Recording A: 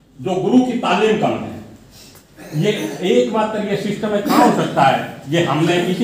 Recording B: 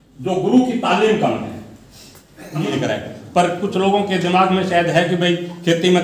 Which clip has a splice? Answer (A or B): B